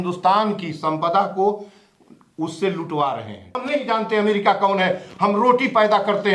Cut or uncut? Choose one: cut